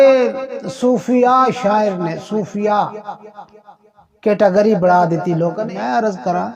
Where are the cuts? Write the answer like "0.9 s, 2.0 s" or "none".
5.6 s

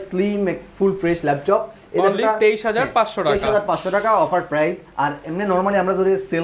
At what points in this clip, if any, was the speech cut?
none

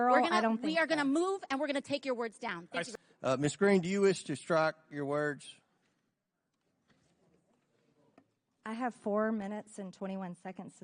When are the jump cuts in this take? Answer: 2.9 s

